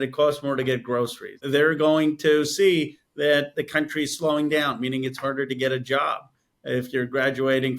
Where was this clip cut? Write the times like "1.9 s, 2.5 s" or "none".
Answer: 1.4 s